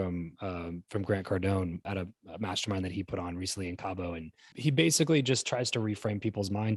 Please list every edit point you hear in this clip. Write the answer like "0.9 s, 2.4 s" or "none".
1.8 s